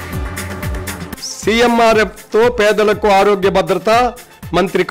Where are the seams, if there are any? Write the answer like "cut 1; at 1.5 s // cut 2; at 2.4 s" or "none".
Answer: cut 1; at 1.0 s